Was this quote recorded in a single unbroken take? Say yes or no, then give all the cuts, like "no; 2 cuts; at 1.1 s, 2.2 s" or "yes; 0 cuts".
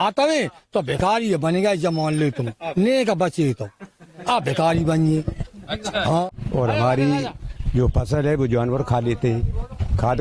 no; 1 cut; at 6.2 s